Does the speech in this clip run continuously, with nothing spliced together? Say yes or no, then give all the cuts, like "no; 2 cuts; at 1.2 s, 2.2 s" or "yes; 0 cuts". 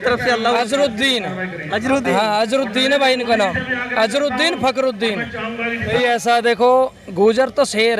no; 1 cut; at 5.9 s